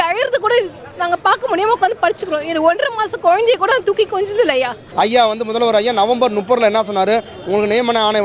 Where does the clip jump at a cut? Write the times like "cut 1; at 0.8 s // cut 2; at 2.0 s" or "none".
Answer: cut 1; at 4.8 s